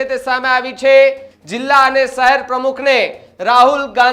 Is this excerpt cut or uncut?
cut